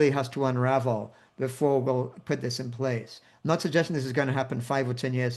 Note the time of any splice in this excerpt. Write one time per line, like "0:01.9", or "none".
none